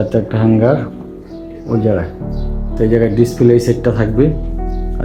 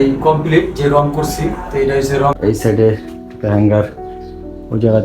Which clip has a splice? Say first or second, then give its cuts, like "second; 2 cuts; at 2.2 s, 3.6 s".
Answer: second; 1 cut; at 2.4 s